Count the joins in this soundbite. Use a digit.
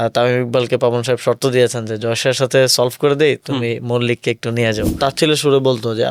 1